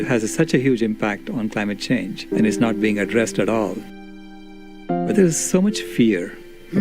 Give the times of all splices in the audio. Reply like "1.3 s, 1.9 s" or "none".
5.1 s